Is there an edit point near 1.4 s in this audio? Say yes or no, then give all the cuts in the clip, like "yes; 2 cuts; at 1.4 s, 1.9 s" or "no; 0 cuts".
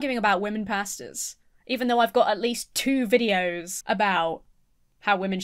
no; 1 cut; at 3.7 s